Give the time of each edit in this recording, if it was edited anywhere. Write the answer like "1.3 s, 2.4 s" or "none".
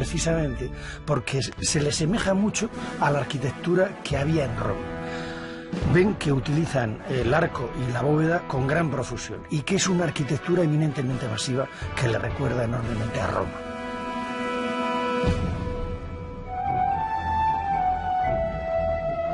none